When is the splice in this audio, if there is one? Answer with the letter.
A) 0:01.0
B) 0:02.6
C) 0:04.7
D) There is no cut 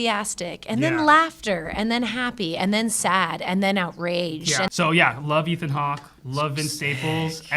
C